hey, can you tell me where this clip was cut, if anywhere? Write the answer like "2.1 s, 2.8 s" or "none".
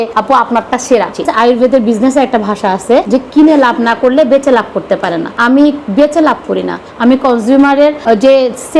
none